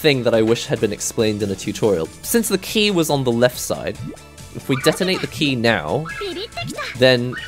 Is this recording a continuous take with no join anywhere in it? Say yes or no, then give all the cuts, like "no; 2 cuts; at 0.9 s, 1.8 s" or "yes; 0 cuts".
no; 1 cut; at 2.1 s